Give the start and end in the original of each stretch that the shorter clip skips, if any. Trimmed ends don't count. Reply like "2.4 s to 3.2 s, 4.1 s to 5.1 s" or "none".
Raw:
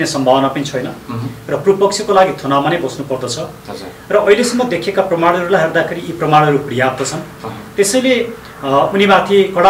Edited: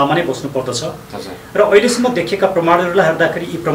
none